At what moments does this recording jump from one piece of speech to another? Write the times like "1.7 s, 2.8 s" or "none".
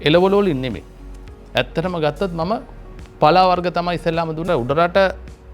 4.5 s